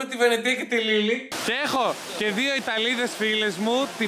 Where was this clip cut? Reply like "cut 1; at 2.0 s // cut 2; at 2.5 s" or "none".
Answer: cut 1; at 1.3 s